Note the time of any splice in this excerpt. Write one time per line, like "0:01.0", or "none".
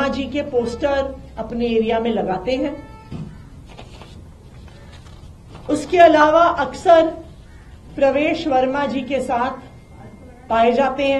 none